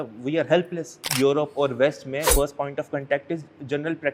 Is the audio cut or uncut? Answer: cut